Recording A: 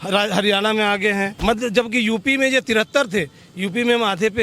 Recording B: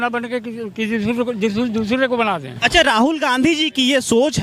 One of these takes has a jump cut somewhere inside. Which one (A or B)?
A